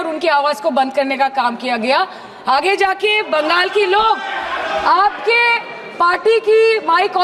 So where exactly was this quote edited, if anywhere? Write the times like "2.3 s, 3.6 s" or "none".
none